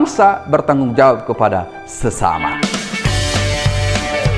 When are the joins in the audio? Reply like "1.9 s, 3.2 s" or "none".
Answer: 2.5 s